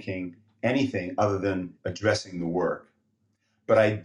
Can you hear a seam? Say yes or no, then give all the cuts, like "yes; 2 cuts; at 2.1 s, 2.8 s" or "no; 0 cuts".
yes; 1 cut; at 1.8 s